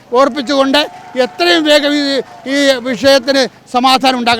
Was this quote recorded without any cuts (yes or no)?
yes